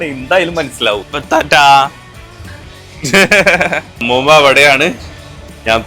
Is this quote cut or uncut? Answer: uncut